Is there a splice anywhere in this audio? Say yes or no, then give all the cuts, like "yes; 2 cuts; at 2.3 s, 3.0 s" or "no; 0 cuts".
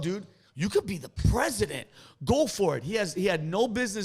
yes; 1 cut; at 1.1 s